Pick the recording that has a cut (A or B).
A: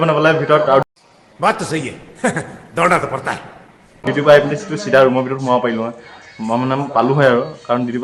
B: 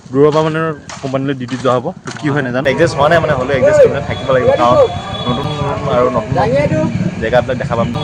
B